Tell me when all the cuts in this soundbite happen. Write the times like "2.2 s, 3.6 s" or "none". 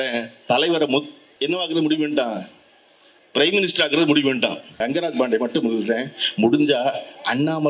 1.2 s, 4.7 s